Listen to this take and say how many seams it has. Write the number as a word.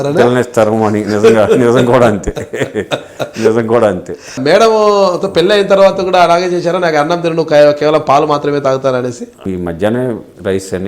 two